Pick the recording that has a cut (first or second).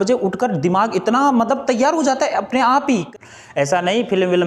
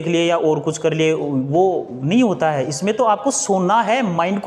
first